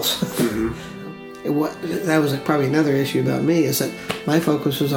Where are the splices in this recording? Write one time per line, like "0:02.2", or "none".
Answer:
0:01.1